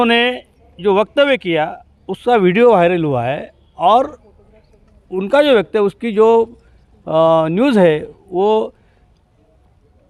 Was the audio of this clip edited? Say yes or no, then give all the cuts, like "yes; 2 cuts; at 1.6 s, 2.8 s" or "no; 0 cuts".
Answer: no; 0 cuts